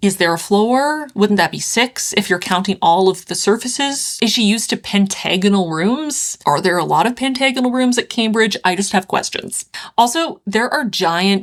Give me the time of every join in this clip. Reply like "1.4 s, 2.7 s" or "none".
none